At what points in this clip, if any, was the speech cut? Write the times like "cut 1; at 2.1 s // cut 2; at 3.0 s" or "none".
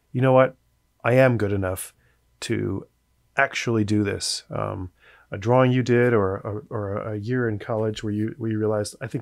none